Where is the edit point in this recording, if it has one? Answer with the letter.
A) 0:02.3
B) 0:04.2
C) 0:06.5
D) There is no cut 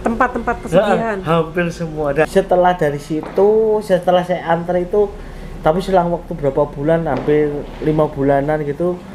A